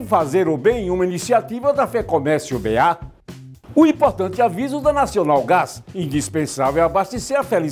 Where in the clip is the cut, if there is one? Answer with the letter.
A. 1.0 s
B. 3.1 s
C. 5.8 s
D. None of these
B